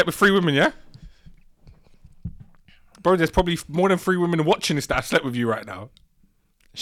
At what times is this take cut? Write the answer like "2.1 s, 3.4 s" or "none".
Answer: none